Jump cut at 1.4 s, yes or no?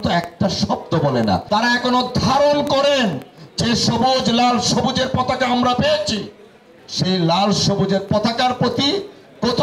yes